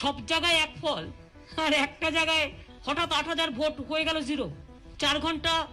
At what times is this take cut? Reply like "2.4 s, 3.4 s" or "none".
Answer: none